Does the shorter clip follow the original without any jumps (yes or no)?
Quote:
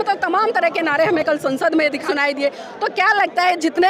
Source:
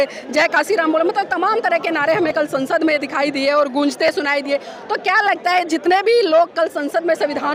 no